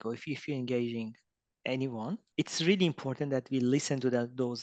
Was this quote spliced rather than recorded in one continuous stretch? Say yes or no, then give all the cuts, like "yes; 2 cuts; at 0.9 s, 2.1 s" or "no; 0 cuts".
yes; 1 cut; at 2.3 s